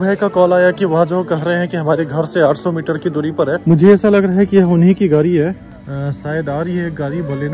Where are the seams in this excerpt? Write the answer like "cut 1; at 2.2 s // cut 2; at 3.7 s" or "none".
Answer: cut 1; at 3.6 s